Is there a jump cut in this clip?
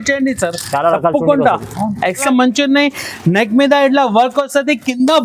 yes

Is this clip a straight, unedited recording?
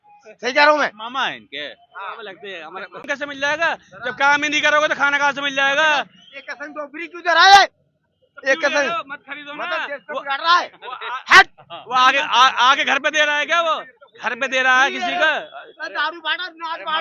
no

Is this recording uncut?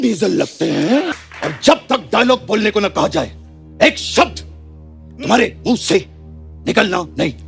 no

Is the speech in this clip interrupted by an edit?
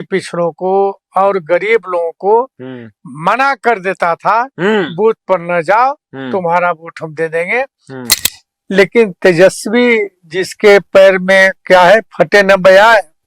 yes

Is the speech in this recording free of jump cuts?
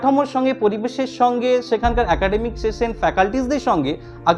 yes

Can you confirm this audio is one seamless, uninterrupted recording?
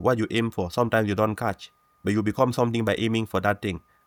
yes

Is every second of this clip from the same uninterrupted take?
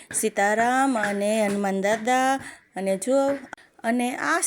no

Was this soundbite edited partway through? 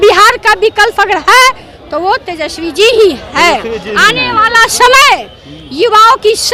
no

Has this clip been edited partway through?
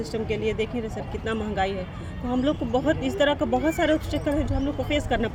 no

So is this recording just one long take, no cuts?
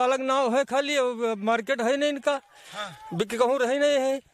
yes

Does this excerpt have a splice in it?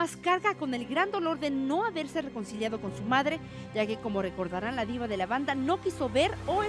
yes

